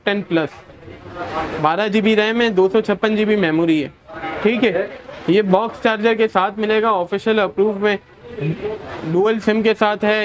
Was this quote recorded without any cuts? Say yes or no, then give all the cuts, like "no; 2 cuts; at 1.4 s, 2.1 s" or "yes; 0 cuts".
yes; 0 cuts